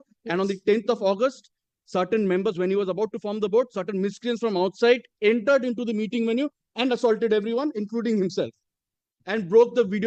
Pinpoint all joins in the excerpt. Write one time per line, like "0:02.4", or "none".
none